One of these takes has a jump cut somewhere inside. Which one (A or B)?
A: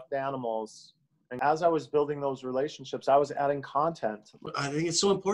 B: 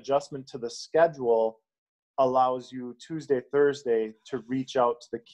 A